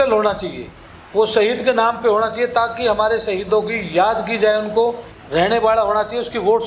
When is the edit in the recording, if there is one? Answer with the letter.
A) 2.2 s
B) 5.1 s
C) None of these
B